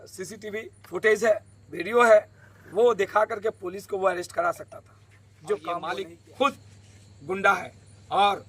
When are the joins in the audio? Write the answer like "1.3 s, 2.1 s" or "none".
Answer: 6.1 s